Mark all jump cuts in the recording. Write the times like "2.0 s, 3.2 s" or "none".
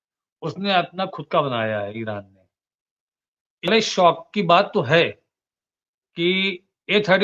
3.7 s